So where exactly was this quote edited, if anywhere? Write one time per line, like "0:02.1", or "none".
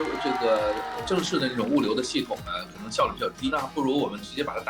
0:03.5